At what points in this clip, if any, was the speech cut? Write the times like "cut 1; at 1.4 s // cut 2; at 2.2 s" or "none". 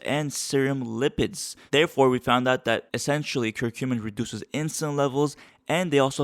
cut 1; at 1.6 s